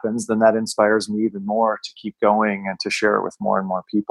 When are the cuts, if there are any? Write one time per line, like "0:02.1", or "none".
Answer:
none